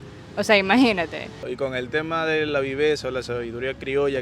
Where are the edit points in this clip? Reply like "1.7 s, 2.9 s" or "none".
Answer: 1.4 s

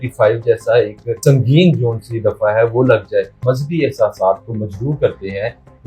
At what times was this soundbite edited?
1.2 s, 3.4 s

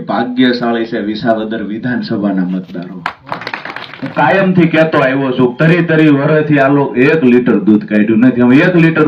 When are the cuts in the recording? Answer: 3.5 s

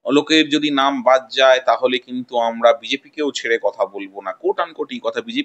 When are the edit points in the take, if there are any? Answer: none

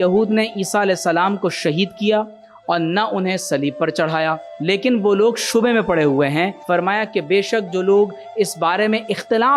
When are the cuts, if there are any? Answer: 4.5 s, 6.6 s

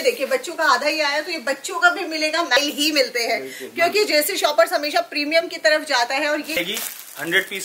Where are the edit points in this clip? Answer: 2.5 s, 6.6 s

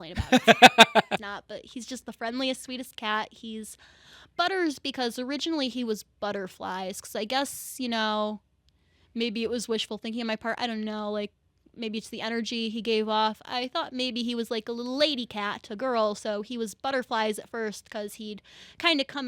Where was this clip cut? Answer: 1.2 s

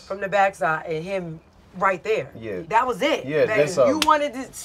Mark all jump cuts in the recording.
2.6 s

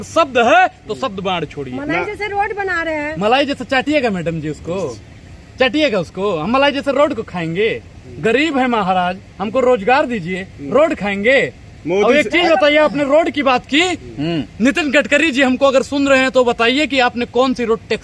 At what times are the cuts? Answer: none

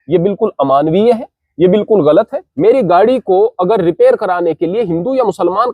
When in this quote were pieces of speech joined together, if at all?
2.4 s

